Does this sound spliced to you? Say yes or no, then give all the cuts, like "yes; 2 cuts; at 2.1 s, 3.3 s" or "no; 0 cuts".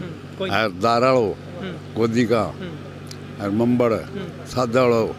no; 0 cuts